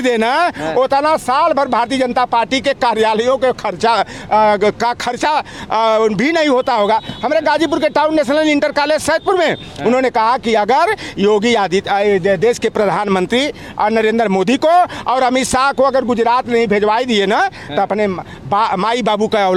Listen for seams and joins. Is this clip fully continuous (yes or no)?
yes